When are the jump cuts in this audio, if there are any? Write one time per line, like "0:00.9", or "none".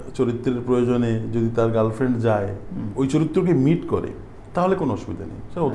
none